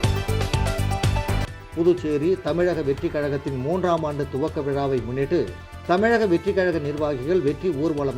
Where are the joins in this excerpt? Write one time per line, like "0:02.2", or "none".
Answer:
0:01.1